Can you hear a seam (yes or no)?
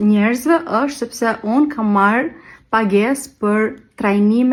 no